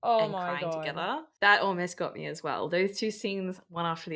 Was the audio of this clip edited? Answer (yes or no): yes